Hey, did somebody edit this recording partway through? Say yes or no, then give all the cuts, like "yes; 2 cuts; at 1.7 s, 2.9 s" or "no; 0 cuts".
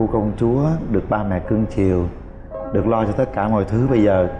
no; 0 cuts